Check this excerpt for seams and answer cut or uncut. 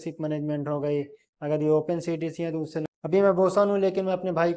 cut